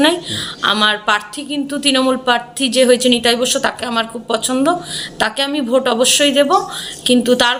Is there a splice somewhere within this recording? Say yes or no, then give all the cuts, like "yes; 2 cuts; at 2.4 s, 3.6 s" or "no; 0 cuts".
no; 0 cuts